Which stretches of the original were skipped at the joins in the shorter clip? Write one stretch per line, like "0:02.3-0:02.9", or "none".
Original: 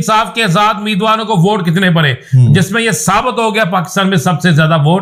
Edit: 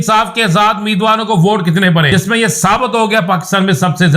0:02.1-0:02.6